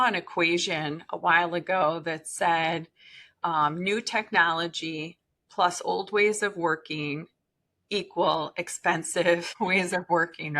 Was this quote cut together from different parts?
yes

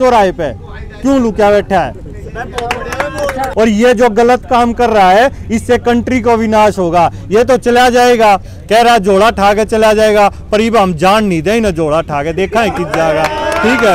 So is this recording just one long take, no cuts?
no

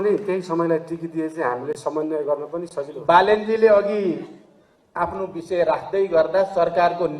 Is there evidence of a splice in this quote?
yes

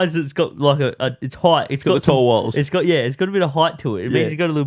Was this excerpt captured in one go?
yes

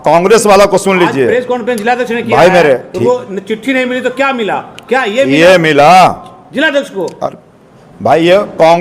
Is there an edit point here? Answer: no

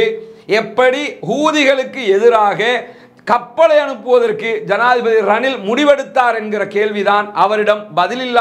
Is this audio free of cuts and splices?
yes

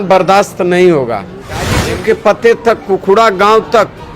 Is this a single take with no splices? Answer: no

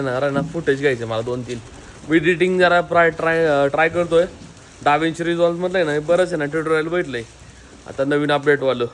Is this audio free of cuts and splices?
yes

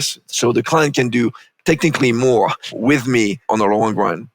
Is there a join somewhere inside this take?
yes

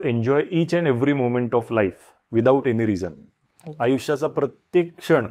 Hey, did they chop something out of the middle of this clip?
no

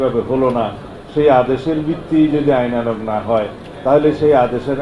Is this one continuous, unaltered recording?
yes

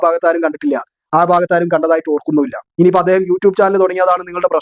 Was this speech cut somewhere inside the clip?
yes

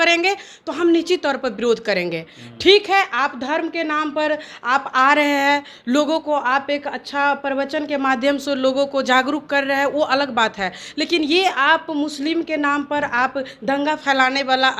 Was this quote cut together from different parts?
no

